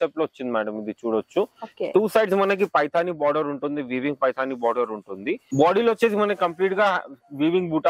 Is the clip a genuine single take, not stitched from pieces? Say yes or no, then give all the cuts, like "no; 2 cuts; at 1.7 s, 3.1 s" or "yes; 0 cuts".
no; 1 cut; at 5.5 s